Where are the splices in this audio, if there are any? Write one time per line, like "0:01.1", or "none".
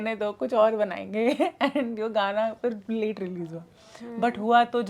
none